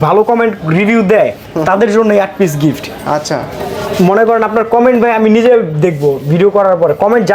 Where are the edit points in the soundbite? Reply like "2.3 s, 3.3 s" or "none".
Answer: none